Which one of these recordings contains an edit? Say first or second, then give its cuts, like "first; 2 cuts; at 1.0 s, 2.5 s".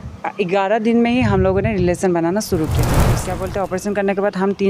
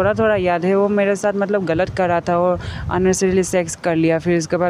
first; 1 cut; at 3.2 s